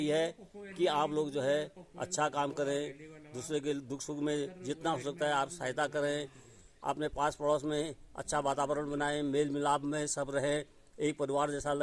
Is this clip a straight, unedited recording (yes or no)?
yes